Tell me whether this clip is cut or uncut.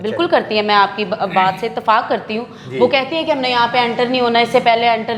uncut